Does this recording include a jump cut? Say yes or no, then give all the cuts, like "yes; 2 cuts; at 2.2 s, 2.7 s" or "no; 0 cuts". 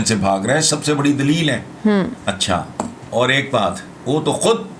yes; 2 cuts; at 3.0 s, 3.9 s